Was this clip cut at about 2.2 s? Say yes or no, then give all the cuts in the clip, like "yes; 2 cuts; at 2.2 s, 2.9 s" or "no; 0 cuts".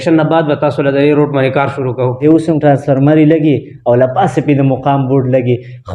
yes; 1 cut; at 2.2 s